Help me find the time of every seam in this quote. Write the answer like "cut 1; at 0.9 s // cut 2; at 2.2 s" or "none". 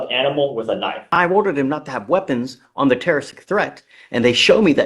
cut 1; at 1.2 s